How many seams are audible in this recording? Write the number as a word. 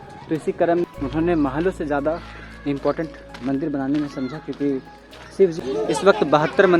two